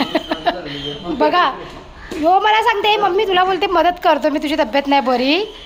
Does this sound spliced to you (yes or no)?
no